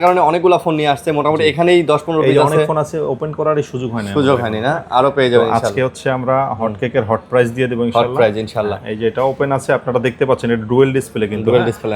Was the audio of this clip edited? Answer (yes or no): no